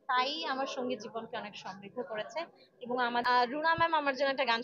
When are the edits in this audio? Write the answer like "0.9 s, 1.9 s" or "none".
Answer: 3.2 s